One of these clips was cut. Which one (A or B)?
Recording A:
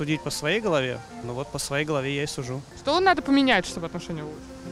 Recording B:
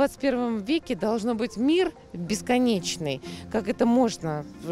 A